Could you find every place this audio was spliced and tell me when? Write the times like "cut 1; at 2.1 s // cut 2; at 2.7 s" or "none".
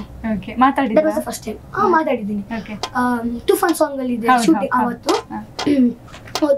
none